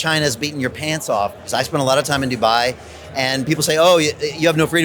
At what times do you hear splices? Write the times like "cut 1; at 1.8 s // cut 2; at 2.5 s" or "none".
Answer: cut 1; at 1.4 s